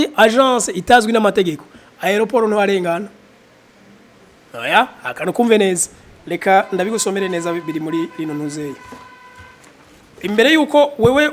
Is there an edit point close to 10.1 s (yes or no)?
yes